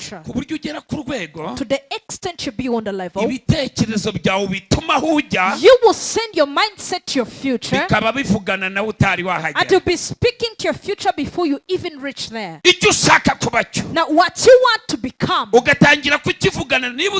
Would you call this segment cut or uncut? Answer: uncut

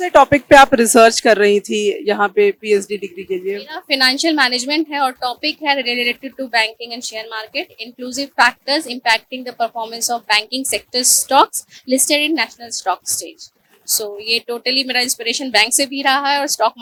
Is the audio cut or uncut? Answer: uncut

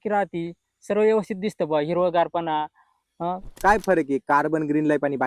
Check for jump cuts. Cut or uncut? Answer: cut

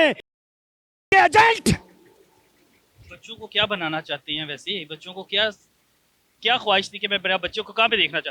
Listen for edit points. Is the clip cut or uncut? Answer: uncut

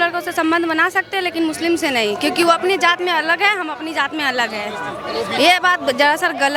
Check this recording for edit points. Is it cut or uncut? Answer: uncut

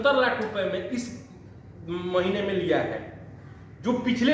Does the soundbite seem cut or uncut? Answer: uncut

